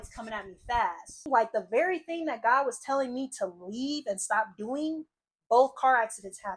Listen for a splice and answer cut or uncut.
cut